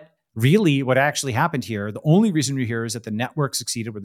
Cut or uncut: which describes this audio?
uncut